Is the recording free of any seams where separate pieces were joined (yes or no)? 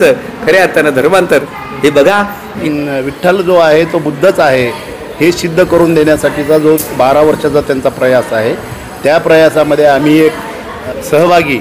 no